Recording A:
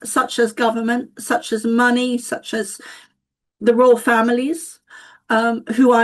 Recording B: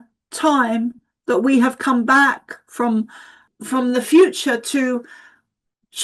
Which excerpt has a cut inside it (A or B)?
B